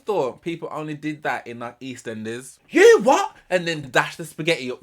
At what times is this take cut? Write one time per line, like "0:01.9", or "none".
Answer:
0:02.5